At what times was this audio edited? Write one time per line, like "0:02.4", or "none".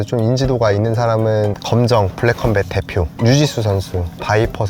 0:01.6
0:03.2